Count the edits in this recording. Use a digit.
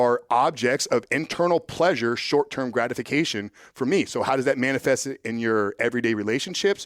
1